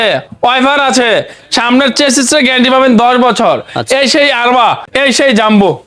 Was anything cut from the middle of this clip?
yes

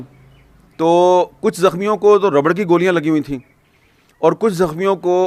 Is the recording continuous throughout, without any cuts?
yes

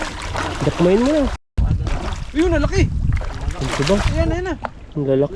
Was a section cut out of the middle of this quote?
yes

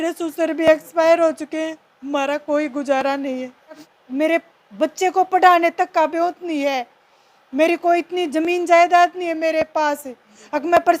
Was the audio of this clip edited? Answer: yes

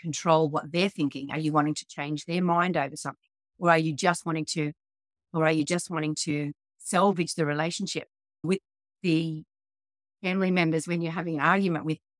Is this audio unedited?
yes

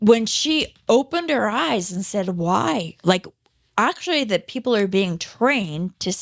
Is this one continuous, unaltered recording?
yes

